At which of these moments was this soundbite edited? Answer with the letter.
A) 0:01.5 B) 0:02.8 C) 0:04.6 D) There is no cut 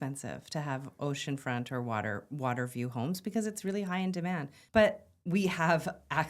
C